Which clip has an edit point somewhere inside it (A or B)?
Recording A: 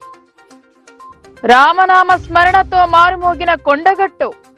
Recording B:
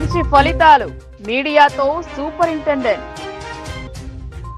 A